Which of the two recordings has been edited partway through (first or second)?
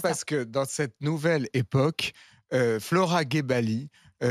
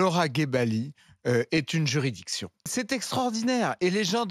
second